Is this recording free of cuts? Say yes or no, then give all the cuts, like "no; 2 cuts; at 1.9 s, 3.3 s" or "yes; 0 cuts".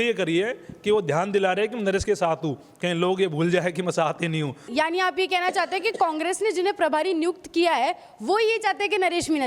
no; 1 cut; at 4.7 s